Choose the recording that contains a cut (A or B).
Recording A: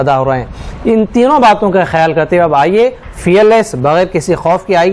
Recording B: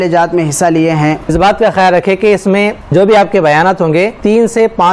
B